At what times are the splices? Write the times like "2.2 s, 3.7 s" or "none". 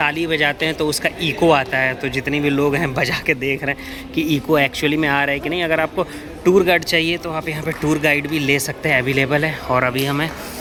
none